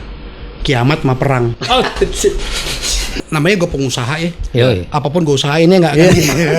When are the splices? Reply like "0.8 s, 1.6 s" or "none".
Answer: 3.2 s